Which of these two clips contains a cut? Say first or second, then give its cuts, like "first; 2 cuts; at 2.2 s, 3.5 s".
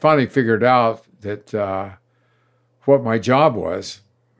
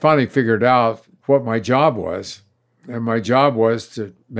second; 1 cut; at 1.1 s